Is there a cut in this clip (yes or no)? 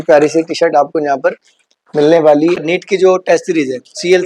yes